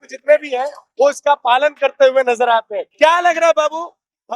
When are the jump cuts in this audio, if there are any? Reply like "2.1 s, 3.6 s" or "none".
2.8 s

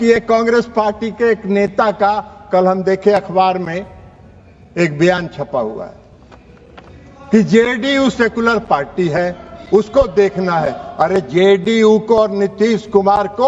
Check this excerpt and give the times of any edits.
none

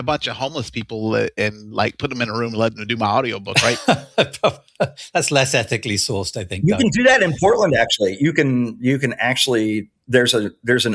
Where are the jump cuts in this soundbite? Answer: none

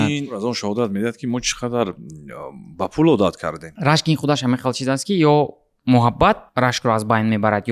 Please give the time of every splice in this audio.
3.8 s

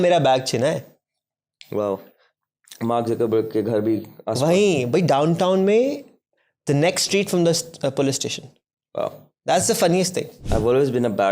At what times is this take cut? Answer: 10.4 s

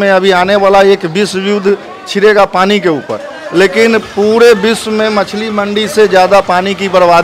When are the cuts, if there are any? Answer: none

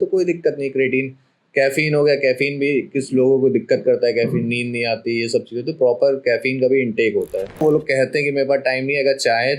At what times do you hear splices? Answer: 7.6 s

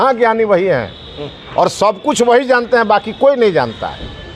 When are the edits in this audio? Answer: none

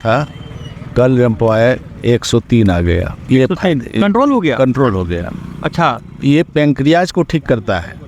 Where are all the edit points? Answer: none

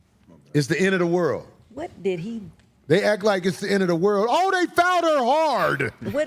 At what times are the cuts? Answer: none

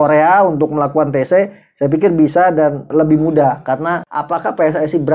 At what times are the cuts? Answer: 2.8 s, 4.0 s

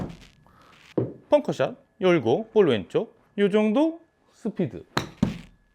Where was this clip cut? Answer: 3.2 s

